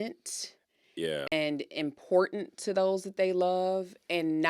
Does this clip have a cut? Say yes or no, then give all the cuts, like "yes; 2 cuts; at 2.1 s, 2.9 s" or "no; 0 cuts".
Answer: yes; 1 cut; at 1.3 s